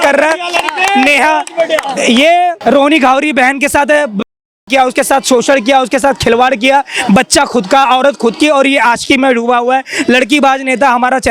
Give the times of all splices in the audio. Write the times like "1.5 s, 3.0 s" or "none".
2.6 s